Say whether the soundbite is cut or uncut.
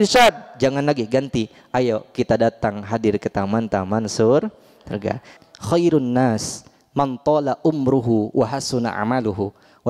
cut